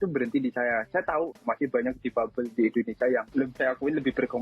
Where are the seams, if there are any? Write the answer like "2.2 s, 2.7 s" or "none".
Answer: 3.5 s